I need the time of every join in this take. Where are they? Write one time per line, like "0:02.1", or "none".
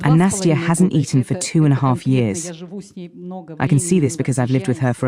none

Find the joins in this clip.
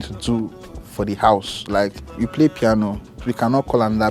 0:02.2
0:03.3

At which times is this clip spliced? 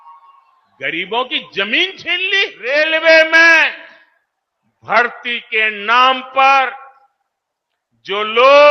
0:02.6

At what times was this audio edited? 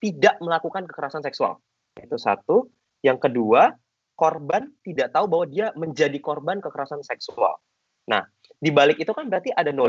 none

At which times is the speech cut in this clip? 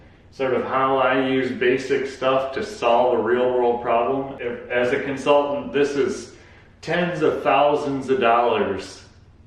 0:04.3

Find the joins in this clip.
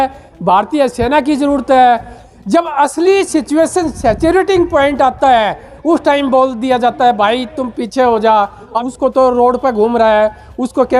0:02.2
0:08.8

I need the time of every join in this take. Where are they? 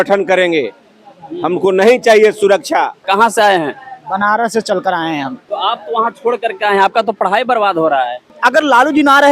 0:03.0
0:05.4
0:08.3

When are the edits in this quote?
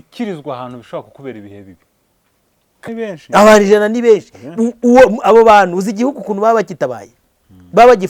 0:02.9

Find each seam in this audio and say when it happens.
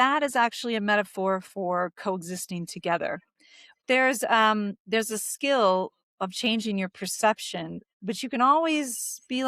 0:03.8
0:07.8

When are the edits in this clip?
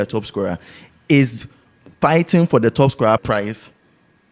0:03.2

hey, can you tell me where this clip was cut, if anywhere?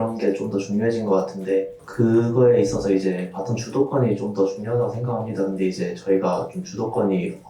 0:01.8

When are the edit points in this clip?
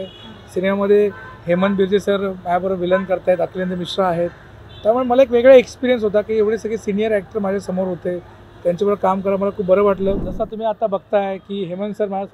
0:10.2

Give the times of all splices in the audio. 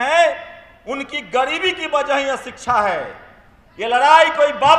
none

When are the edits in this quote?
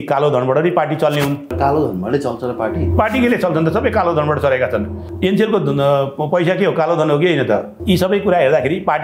0:01.5
0:05.0
0:07.7

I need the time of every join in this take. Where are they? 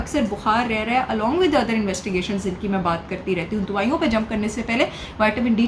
none

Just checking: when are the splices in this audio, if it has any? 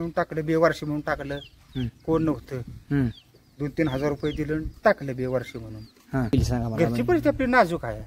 0:06.3

